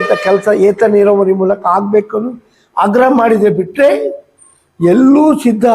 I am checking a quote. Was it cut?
no; 0 cuts

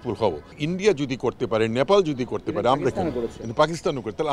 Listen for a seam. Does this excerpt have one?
no; 0 cuts

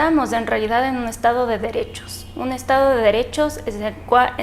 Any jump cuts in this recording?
no; 0 cuts

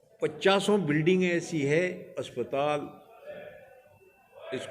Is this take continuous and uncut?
yes; 0 cuts

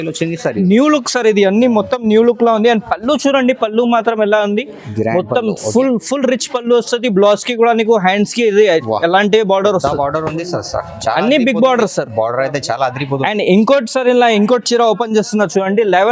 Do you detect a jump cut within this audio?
no; 0 cuts

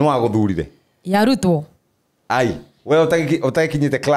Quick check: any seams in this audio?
no; 0 cuts

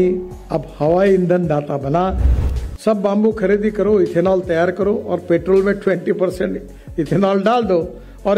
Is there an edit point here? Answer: yes; 1 cut; at 2.3 s

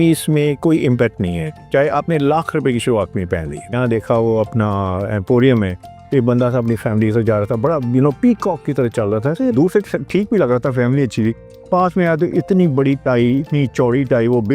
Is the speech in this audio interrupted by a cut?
yes; 2 cuts; at 3.8 s, 9.5 s

